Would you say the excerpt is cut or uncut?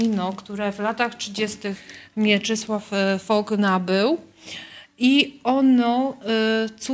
uncut